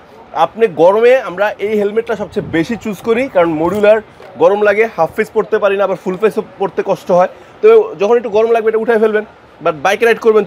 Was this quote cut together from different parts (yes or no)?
no